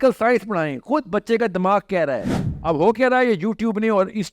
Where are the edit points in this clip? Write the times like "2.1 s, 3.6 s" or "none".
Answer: 2.5 s